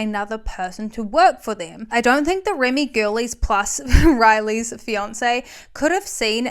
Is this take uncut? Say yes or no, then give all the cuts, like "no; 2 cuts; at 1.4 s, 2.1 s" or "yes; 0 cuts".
no; 1 cut; at 1.7 s